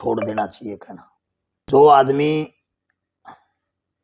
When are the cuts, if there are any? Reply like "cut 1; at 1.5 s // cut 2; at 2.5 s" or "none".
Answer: none